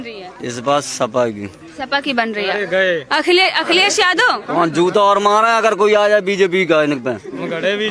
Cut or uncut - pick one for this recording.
uncut